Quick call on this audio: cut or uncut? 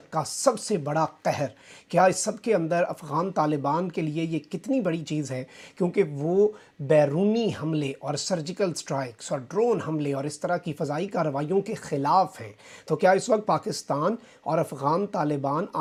uncut